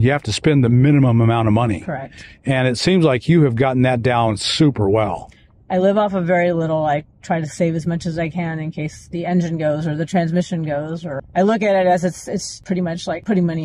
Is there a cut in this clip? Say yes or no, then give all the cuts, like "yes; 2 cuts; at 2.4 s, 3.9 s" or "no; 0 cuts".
yes; 2 cuts; at 11.2 s, 12.7 s